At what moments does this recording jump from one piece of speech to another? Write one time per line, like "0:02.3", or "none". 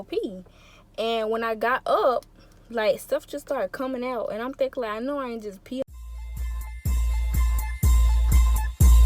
0:05.9